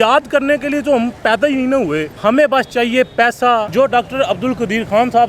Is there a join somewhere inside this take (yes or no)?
yes